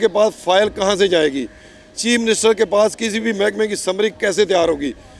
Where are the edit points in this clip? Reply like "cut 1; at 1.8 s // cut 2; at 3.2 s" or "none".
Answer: none